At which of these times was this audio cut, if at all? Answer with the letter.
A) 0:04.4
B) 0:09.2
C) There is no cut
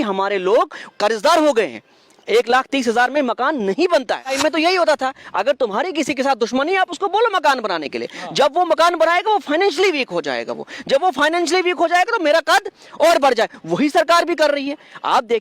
A